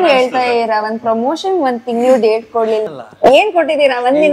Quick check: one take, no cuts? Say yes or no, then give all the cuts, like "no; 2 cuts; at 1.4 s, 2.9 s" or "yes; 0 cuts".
yes; 0 cuts